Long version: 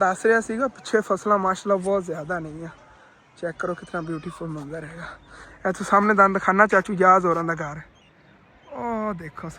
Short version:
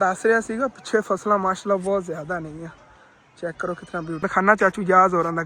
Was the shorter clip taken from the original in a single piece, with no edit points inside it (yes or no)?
no